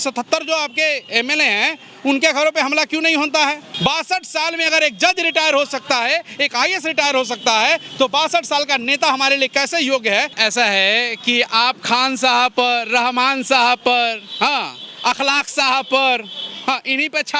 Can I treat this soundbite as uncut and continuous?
no; 2 cuts; at 3.7 s, 10.3 s

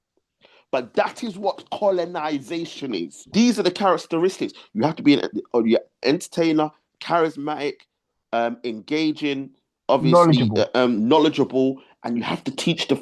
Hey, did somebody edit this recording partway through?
yes; 1 cut; at 3.3 s

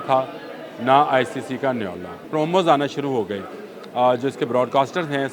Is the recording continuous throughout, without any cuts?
no; 1 cut; at 2.2 s

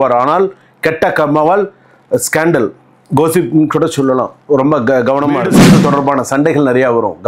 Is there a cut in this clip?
yes; 1 cut; at 5.6 s

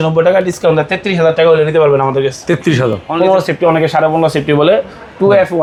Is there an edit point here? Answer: no; 0 cuts

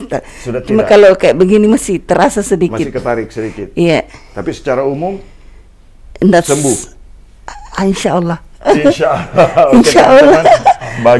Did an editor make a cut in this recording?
no; 0 cuts

